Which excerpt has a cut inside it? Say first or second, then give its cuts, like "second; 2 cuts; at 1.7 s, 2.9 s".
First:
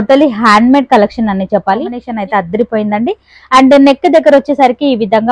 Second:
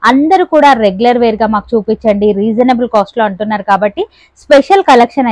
first; 1 cut; at 2.1 s